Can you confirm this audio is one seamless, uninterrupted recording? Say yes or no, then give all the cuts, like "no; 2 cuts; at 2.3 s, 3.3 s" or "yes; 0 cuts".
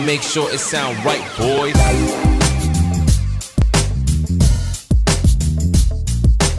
yes; 0 cuts